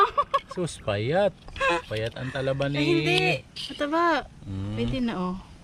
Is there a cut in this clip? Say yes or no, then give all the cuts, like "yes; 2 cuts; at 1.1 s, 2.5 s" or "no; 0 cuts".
no; 0 cuts